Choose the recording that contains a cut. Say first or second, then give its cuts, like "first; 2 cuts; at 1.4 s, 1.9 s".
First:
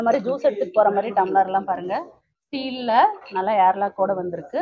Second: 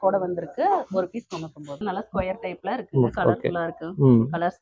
second; 1 cut; at 1.8 s